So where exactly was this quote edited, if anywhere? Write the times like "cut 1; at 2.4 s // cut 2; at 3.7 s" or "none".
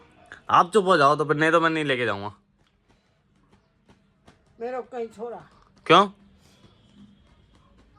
none